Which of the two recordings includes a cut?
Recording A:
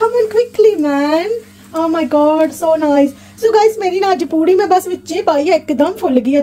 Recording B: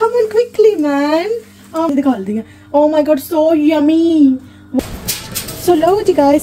B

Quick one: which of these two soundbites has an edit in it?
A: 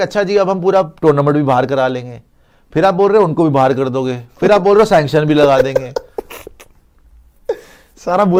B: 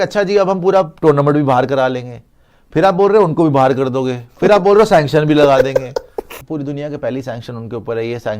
B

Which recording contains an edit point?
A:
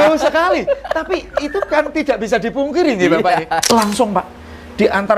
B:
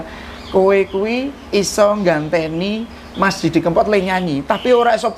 A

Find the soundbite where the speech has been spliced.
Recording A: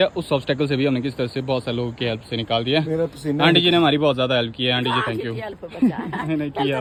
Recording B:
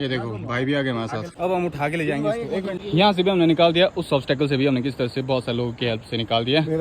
B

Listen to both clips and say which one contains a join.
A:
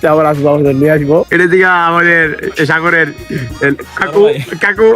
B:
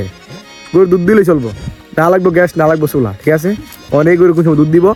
A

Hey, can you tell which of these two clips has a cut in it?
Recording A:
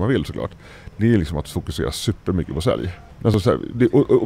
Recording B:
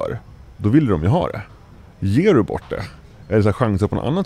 A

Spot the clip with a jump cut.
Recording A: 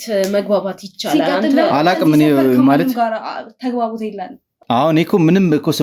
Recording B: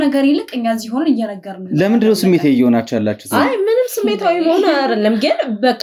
A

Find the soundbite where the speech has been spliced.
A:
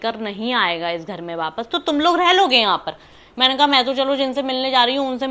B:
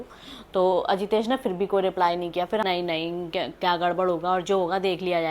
B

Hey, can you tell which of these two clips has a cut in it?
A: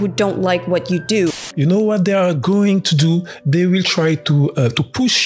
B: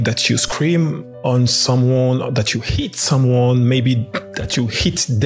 A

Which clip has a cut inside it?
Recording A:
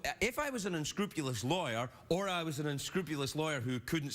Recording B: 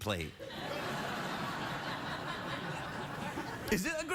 A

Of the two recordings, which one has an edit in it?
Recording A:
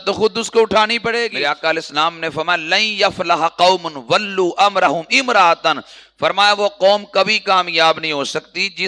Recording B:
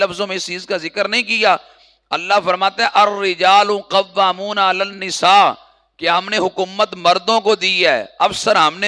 A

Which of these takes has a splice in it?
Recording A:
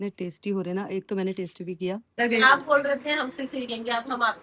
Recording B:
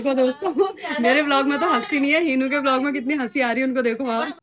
A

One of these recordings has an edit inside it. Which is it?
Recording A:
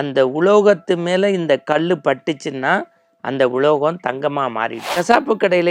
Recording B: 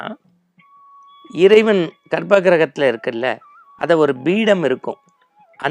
A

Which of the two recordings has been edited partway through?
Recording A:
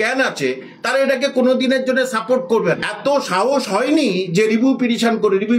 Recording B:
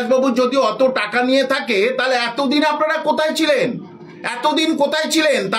A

